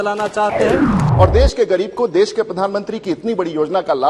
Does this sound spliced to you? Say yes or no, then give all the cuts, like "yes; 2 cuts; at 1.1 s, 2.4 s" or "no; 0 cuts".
yes; 1 cut; at 1.0 s